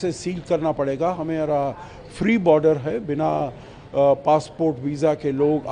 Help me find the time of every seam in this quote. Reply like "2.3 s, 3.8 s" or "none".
none